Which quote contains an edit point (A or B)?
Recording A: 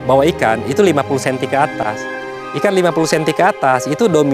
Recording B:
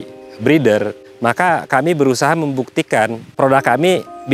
B